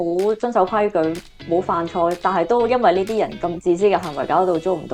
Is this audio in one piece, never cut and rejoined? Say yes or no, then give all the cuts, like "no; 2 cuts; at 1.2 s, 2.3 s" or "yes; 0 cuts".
yes; 0 cuts